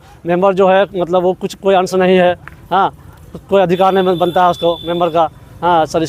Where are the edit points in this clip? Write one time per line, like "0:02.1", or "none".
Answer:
none

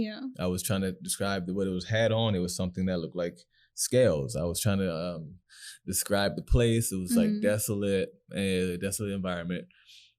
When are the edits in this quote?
none

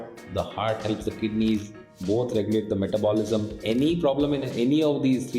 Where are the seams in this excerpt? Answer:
none

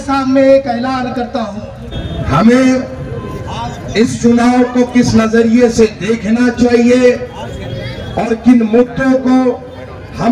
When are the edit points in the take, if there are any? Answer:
0:01.9

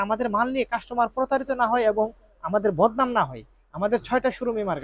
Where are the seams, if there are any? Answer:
none

